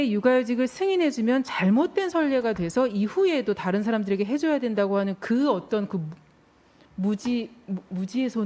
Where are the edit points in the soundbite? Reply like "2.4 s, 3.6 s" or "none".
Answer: none